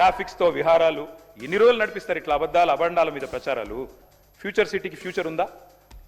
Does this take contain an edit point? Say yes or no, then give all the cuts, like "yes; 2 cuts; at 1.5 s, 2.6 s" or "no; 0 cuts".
yes; 1 cut; at 4.0 s